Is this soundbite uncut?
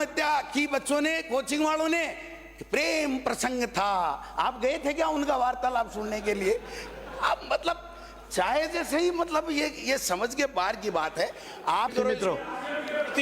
no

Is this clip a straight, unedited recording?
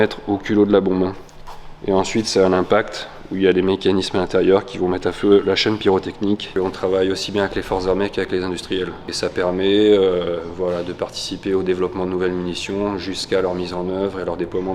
no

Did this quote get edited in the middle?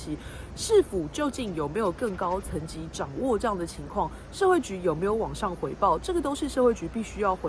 no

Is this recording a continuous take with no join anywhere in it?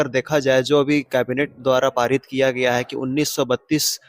yes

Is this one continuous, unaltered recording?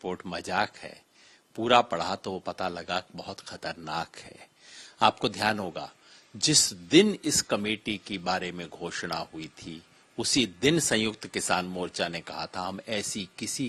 yes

